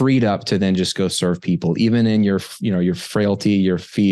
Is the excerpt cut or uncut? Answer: uncut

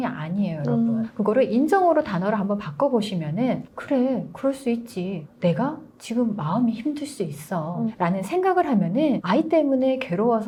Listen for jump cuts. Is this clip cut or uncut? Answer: uncut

